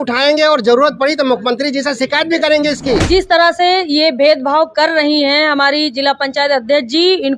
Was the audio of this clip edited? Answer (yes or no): yes